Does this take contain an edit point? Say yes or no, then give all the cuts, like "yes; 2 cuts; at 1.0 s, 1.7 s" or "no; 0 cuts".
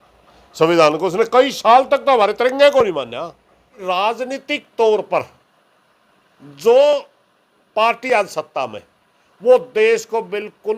yes; 1 cut; at 3.7 s